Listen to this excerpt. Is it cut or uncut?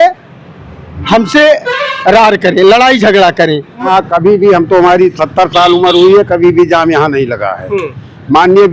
cut